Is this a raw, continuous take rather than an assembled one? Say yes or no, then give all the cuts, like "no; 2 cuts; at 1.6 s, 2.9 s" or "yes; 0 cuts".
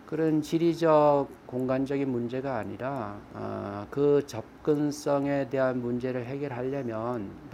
yes; 0 cuts